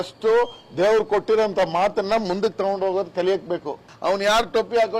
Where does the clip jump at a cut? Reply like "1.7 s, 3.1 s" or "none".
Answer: 3.8 s